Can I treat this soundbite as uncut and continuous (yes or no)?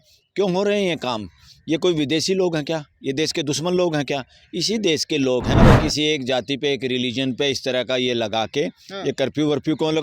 no